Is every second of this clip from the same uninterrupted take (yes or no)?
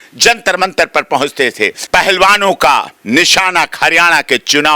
no